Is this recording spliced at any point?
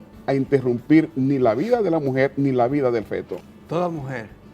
yes; 1 cut; at 3.3 s

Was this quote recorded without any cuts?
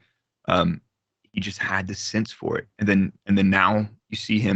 yes; 0 cuts

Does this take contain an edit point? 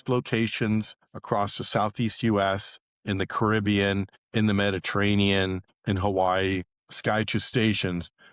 no; 0 cuts

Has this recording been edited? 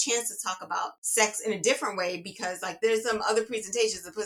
yes; 2 cuts; at 1.0 s, 2.7 s

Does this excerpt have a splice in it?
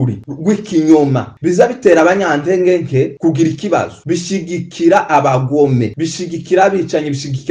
no; 0 cuts

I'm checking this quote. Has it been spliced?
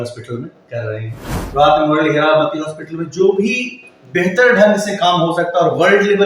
yes; 1 cut; at 1.4 s

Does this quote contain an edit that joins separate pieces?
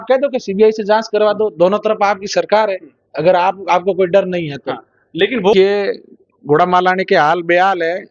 yes; 1 cut; at 5.5 s

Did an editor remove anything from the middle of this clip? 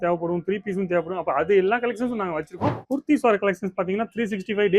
yes; 1 cut; at 2.8 s

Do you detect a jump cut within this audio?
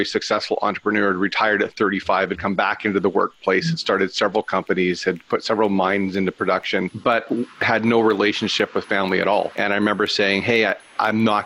yes; 2 cuts; at 6.9 s, 9.5 s

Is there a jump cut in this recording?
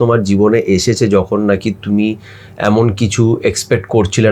no; 0 cuts

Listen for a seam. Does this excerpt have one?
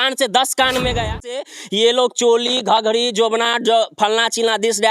yes; 1 cut; at 1.4 s

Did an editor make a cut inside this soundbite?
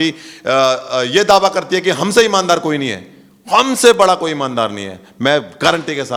no; 0 cuts

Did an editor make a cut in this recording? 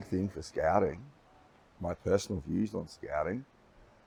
no; 0 cuts

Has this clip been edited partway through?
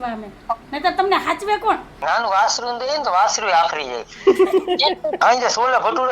yes; 2 cuts; at 1.9 s, 5.2 s

